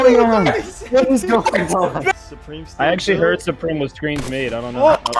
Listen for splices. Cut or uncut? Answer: cut